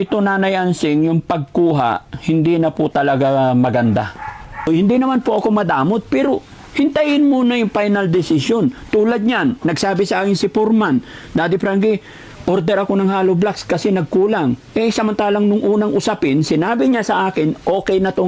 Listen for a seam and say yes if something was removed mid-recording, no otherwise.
yes